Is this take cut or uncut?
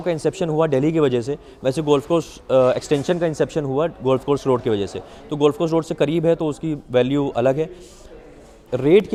uncut